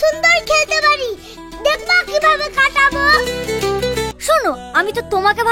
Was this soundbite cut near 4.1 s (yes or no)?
yes